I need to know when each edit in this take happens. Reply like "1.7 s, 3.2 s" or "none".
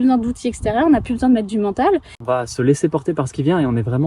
2.1 s